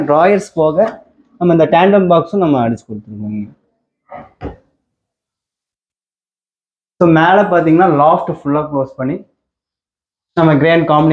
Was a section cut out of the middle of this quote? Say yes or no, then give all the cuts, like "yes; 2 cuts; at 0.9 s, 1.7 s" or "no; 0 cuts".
no; 0 cuts